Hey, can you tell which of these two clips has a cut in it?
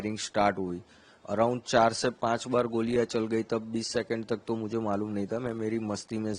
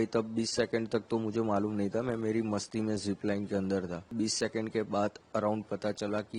second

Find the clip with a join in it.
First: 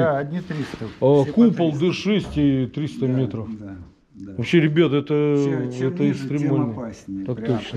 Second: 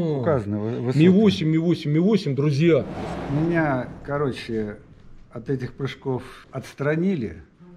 second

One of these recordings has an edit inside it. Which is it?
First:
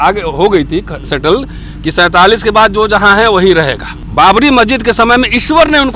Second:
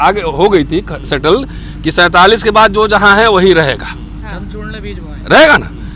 first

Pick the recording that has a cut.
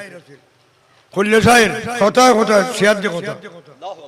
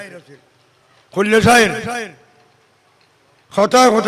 first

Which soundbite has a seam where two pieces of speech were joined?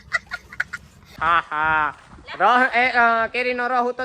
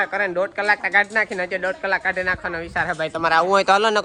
first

